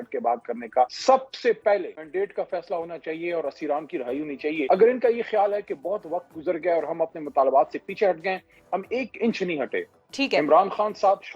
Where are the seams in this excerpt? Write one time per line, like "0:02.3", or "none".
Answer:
0:01.0
0:02.0
0:04.7